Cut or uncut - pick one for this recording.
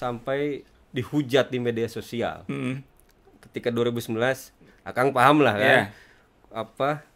uncut